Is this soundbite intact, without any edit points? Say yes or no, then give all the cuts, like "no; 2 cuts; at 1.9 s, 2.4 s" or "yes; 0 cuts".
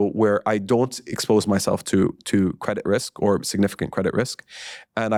yes; 0 cuts